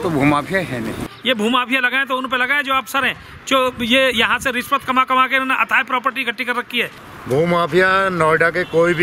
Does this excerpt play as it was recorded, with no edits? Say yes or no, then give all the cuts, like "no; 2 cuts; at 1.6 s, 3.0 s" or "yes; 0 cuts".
no; 2 cuts; at 1.0 s, 7.1 s